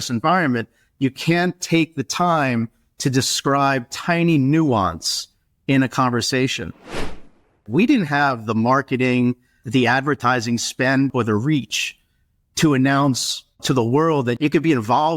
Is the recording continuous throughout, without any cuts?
no; 1 cut; at 7.1 s

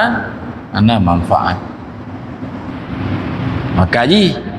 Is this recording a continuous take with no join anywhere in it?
no; 1 cut; at 2.7 s

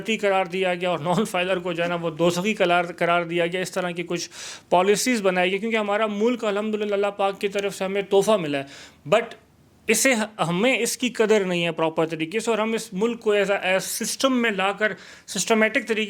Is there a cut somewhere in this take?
no; 0 cuts

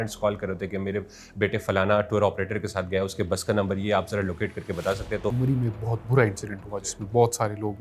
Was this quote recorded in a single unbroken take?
no; 1 cut; at 5.4 s

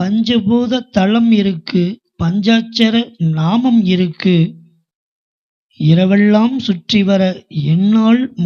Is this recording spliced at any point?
no; 0 cuts

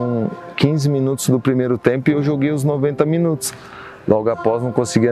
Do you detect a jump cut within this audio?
no; 0 cuts

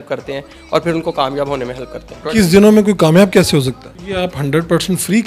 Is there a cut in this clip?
yes; 2 cuts; at 2.2 s, 3.8 s

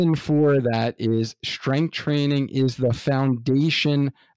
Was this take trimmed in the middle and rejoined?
no; 0 cuts

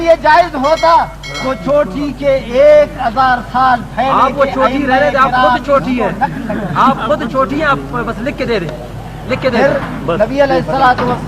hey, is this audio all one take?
yes; 0 cuts

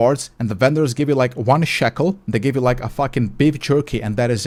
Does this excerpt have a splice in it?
no; 0 cuts

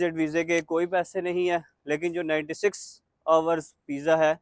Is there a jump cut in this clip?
no; 0 cuts

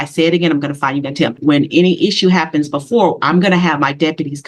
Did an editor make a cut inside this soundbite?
yes; 1 cut; at 1.4 s

